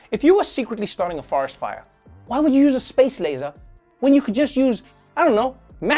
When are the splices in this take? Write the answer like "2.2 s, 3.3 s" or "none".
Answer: none

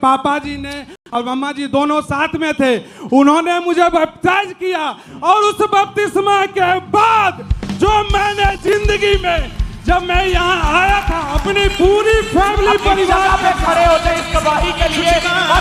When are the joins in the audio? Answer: none

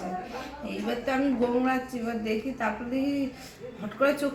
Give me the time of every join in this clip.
none

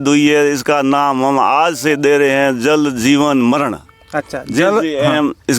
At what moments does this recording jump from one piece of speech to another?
none

